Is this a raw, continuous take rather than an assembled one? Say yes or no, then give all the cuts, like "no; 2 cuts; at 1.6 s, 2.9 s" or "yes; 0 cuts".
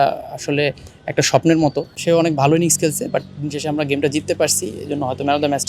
no; 1 cut; at 2.0 s